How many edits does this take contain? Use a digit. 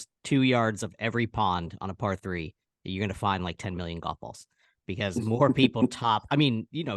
0